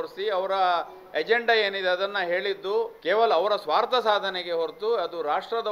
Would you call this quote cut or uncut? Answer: cut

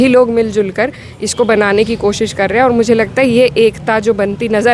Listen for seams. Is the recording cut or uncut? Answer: uncut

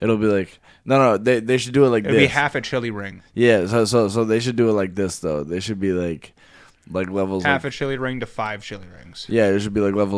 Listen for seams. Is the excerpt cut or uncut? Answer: uncut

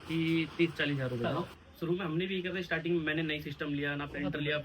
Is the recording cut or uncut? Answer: cut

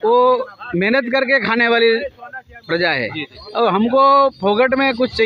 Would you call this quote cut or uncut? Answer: uncut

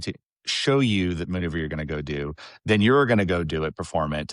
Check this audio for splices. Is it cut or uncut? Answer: uncut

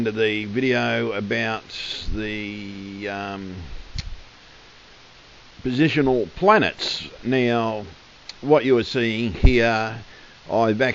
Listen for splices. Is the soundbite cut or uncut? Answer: cut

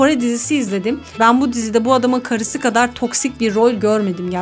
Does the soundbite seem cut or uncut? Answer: uncut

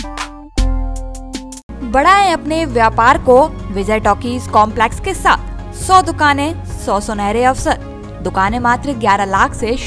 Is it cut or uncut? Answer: uncut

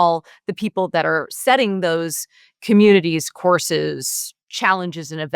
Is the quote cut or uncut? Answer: uncut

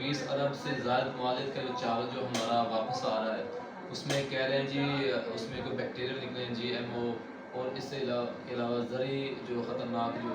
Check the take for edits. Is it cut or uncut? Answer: uncut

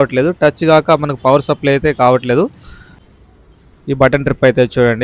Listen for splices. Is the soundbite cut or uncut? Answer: cut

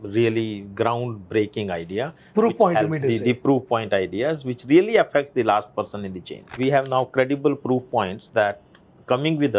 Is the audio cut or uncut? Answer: cut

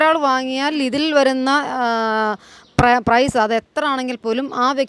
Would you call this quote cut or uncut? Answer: uncut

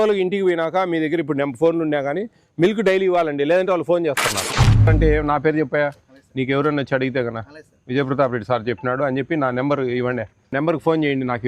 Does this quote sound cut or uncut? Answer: cut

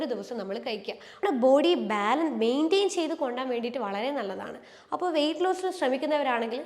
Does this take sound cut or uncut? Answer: cut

